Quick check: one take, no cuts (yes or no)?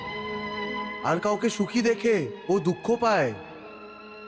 yes